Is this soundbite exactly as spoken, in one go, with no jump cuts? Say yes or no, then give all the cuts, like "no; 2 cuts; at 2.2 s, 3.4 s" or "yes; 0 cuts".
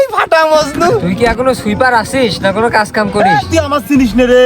no; 2 cuts; at 1.0 s, 3.2 s